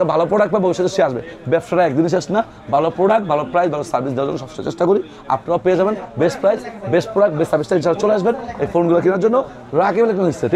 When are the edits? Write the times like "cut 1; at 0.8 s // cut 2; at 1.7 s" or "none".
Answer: none

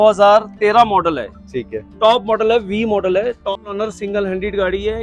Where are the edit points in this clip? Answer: cut 1; at 3.6 s

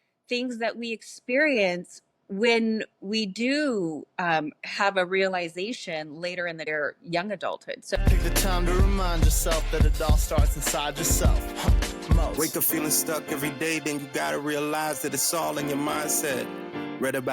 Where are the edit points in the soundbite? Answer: cut 1; at 6.6 s // cut 2; at 8.0 s

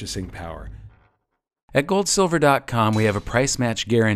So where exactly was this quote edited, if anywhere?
cut 1; at 1.1 s

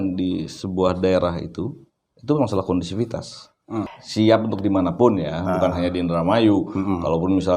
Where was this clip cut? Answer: cut 1; at 4.0 s

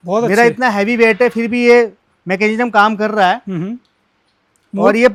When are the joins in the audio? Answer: none

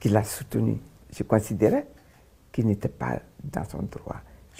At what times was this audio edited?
cut 1; at 1.0 s

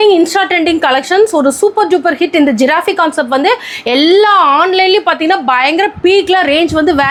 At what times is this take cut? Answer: none

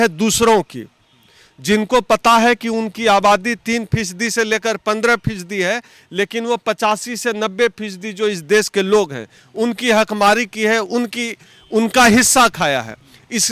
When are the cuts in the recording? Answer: none

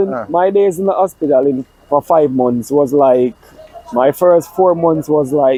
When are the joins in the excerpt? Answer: none

